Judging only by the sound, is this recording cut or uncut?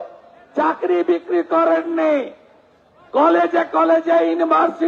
uncut